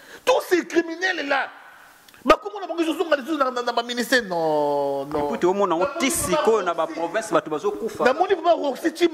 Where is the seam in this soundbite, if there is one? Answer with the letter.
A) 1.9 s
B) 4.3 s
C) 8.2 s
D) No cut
D